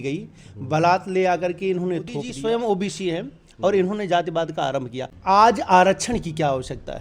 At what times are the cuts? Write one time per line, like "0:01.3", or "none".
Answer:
0:02.3
0:05.1